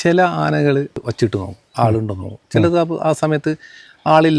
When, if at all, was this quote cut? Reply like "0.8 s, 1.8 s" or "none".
0.9 s